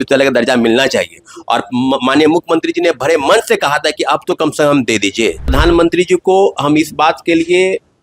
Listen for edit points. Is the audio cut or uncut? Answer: cut